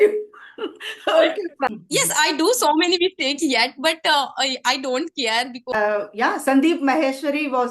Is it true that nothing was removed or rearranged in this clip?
no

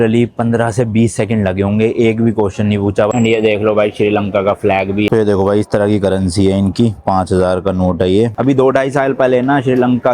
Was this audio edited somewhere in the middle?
yes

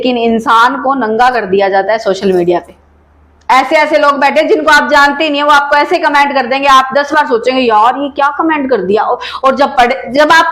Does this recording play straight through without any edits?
yes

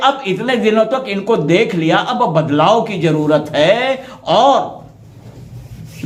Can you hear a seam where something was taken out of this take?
no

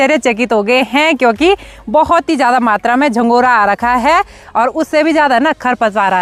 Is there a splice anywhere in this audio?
no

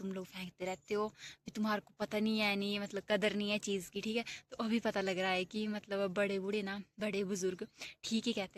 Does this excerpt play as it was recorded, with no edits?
yes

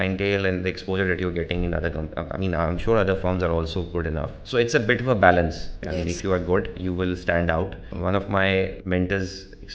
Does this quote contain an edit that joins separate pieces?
yes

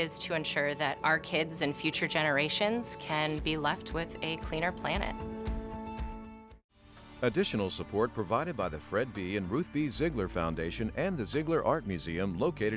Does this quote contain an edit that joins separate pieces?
yes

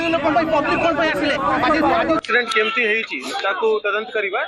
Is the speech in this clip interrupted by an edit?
yes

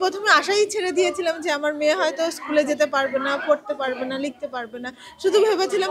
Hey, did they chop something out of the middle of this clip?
no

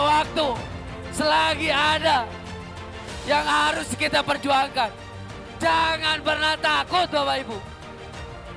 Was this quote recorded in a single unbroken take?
yes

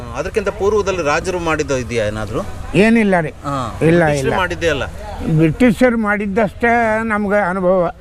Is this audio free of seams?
yes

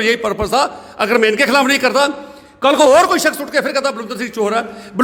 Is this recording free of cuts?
yes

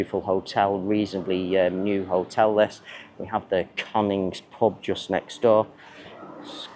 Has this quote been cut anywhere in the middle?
no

